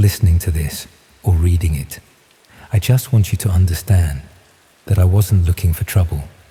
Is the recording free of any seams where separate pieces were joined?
yes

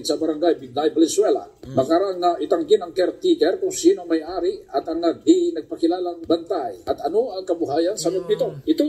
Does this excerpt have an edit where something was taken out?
no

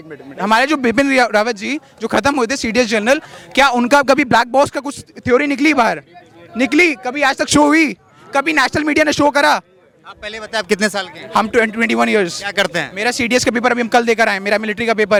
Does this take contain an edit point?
no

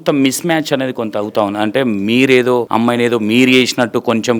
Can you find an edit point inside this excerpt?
yes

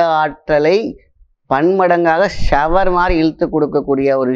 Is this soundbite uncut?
yes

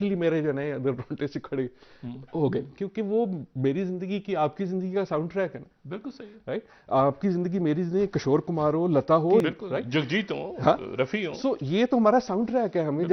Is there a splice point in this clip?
yes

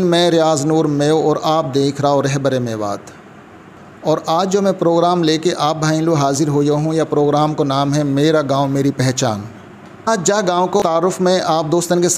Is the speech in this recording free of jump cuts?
yes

